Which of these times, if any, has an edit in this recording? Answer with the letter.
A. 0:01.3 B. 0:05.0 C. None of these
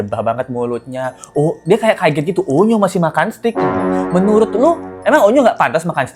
C